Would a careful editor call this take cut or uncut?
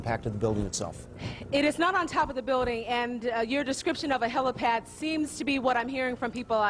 cut